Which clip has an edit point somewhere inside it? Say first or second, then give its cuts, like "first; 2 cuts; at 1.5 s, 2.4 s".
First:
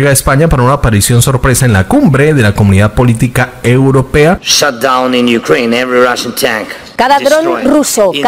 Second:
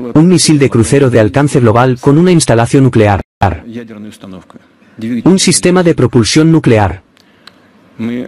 first; 1 cut; at 4.4 s